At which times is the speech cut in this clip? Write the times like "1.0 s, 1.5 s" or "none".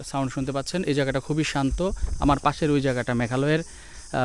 none